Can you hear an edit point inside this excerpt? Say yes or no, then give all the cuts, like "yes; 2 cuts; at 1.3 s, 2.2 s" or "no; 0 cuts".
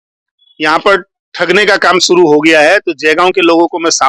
no; 0 cuts